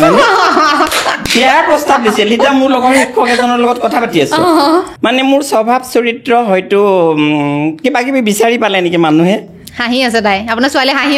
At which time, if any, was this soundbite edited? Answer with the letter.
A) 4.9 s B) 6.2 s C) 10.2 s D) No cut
A